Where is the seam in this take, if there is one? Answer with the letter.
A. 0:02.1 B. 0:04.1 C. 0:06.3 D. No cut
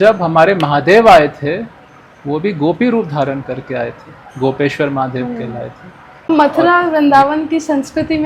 C